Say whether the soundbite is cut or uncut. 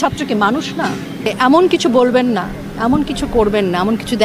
cut